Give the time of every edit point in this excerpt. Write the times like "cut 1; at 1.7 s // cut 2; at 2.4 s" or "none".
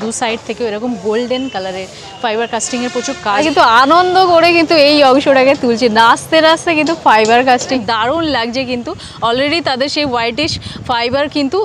cut 1; at 3.4 s // cut 2; at 7.8 s